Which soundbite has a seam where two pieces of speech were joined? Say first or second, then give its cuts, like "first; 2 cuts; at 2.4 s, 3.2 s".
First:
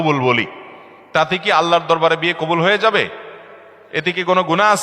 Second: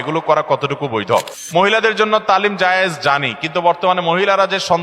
second; 1 cut; at 1.4 s